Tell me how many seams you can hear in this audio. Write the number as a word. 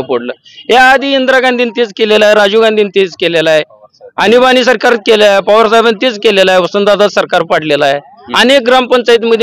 zero